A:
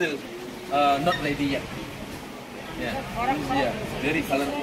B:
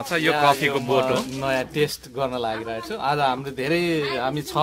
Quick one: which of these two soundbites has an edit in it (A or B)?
B